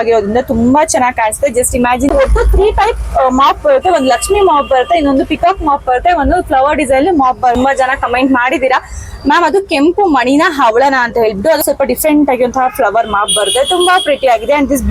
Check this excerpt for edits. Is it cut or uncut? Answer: cut